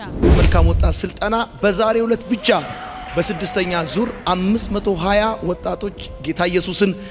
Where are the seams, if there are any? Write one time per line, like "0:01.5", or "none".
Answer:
none